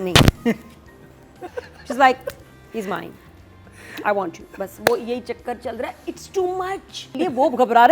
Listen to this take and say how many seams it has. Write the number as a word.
two